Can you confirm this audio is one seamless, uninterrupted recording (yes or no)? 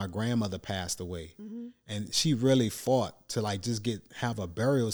yes